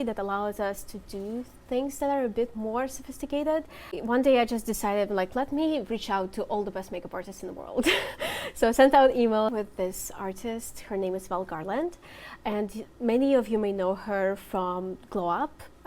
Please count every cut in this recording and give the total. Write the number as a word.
two